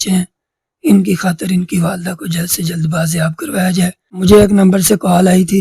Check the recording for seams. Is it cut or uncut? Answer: cut